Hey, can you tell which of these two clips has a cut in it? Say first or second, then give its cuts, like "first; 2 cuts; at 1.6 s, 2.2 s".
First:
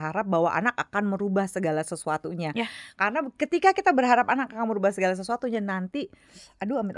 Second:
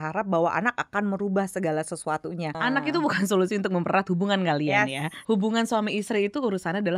second; 2 cuts; at 2.5 s, 5.2 s